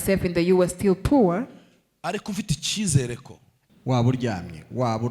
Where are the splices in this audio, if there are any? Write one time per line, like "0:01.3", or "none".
0:03.6